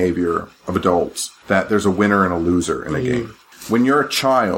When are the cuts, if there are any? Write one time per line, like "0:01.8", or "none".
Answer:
0:01.3